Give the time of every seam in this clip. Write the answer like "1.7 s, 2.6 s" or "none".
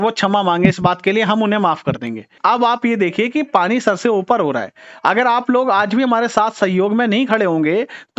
2.4 s